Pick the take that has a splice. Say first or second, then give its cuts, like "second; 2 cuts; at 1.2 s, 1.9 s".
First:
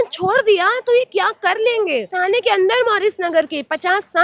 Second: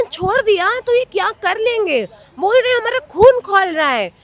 first; 1 cut; at 2.1 s